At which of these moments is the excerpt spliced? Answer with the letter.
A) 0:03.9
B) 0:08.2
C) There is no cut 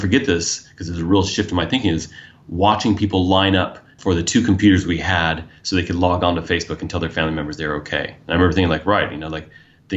A